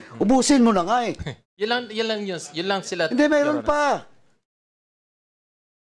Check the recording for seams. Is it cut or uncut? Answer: uncut